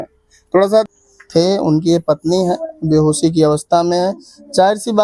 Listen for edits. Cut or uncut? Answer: cut